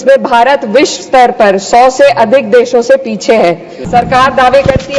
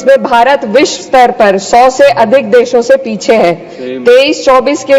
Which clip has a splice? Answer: first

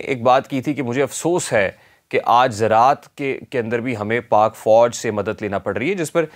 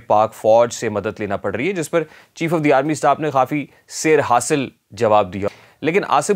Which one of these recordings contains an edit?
second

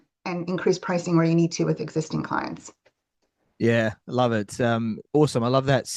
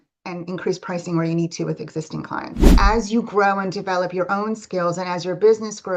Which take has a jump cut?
second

